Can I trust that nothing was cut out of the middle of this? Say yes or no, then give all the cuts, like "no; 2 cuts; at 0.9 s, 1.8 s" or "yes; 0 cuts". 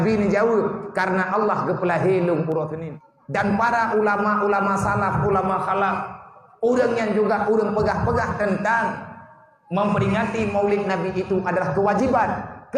no; 1 cut; at 2.8 s